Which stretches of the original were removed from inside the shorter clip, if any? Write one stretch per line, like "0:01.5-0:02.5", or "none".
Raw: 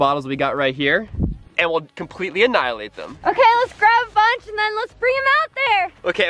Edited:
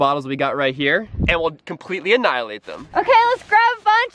0:01.2-0:01.5